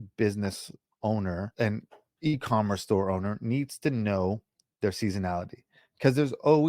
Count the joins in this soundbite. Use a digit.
1